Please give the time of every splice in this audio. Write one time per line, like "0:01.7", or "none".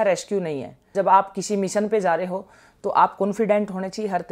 0:00.9